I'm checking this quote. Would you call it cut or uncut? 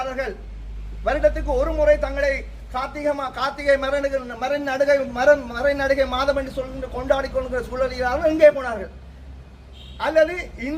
uncut